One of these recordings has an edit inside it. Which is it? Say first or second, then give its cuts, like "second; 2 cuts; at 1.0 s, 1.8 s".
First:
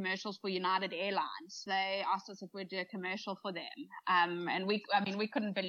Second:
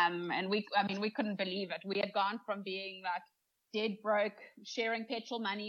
first; 1 cut; at 1.6 s